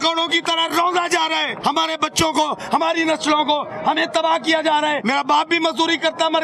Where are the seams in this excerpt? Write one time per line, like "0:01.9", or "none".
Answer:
0:01.5
0:05.0